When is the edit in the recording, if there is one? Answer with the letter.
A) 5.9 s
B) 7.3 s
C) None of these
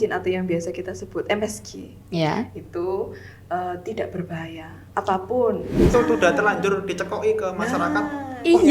A